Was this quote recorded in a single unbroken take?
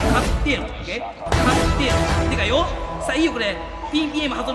yes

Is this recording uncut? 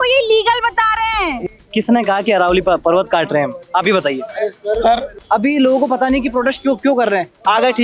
no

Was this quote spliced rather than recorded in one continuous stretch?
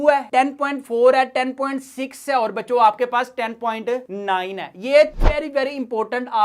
no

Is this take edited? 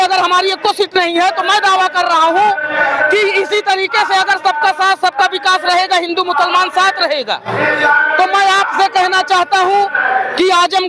no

